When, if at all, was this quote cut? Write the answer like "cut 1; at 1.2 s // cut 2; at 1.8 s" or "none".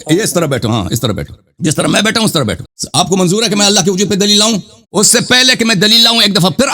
cut 1; at 2.8 s // cut 2; at 4.8 s